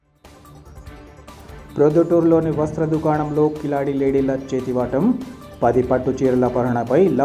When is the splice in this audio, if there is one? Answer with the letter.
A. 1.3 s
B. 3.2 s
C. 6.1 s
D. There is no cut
A